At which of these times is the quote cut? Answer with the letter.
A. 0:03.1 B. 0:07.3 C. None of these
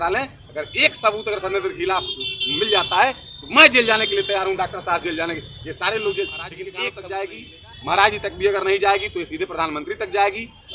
B